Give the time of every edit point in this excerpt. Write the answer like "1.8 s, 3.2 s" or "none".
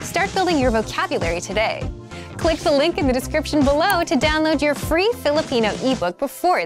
none